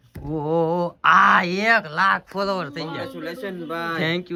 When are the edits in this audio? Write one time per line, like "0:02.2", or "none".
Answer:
none